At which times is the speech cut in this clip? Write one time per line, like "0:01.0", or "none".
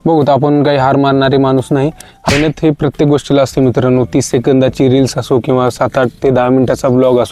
0:02.1